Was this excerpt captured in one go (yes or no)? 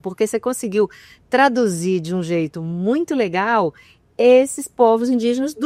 yes